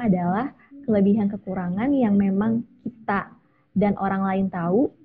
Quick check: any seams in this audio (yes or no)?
no